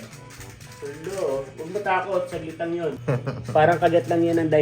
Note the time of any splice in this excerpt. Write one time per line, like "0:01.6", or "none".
0:03.0